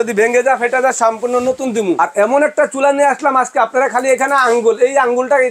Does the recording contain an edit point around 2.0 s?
yes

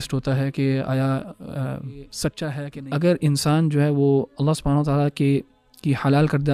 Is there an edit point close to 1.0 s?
no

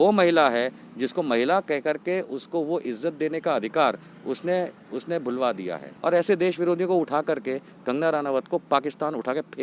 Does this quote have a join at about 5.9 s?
yes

